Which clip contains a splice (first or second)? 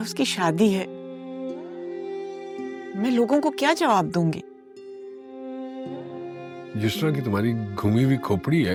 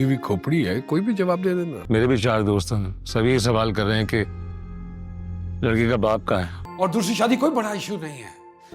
second